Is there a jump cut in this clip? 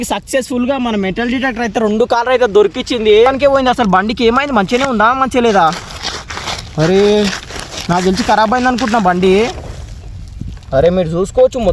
yes; 1 cut; at 3.3 s

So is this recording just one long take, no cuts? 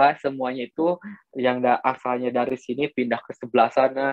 yes; 0 cuts

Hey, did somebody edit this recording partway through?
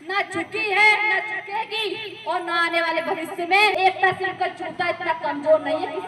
yes; 1 cut; at 3.7 s

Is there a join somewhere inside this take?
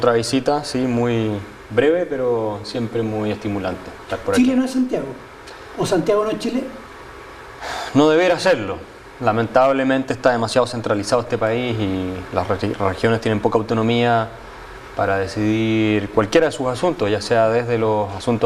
no; 0 cuts

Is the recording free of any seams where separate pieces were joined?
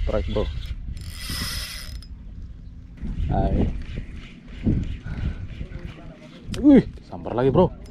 no; 1 cut; at 3.0 s

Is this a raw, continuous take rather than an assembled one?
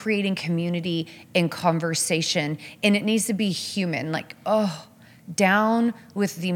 yes; 0 cuts

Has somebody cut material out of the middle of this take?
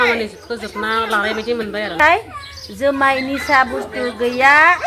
yes; 1 cut; at 2.0 s

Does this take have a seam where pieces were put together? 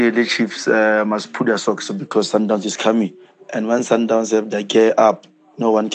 no; 0 cuts

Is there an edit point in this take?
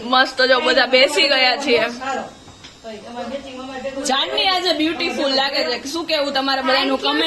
no; 0 cuts

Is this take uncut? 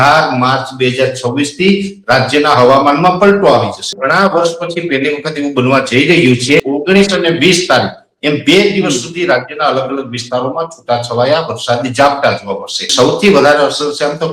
no; 3 cuts; at 3.9 s, 6.6 s, 12.9 s

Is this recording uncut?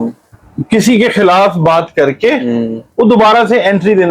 yes; 0 cuts

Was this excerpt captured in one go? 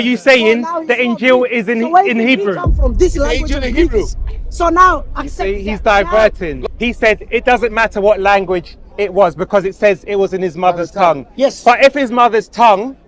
no; 1 cut; at 6.6 s

